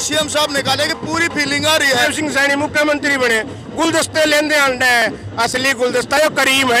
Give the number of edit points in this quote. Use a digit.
1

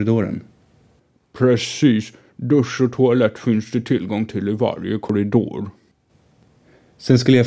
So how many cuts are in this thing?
2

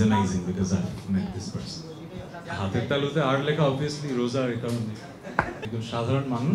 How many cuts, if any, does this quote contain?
2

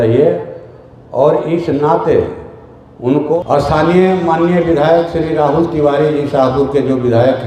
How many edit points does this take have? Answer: 1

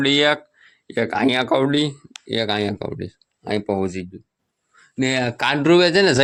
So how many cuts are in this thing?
0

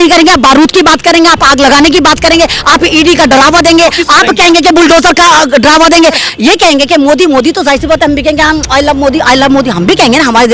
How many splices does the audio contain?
1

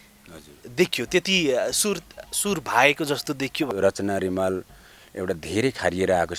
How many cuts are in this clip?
1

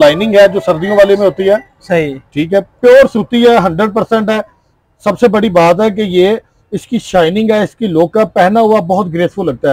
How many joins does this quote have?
0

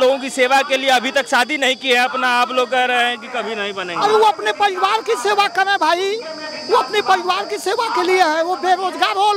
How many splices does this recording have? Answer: 0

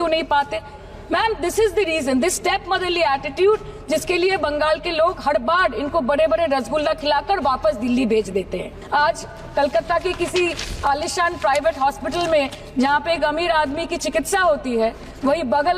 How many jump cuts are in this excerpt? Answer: 1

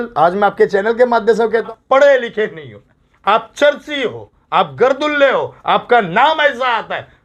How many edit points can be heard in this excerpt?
1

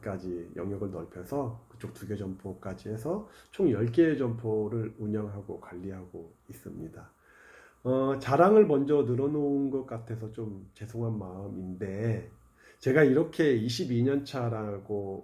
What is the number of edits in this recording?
0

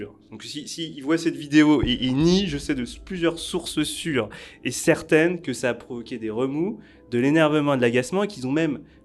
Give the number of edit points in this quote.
0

